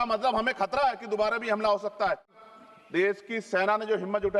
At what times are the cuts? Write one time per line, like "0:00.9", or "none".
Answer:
0:02.3